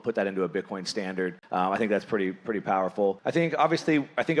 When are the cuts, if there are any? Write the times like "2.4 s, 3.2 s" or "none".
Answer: 1.4 s, 3.2 s